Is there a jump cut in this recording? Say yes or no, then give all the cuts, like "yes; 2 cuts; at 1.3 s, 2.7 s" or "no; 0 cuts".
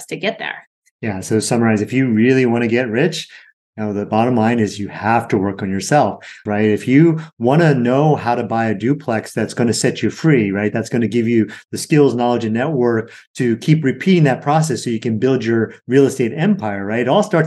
yes; 1 cut; at 6.4 s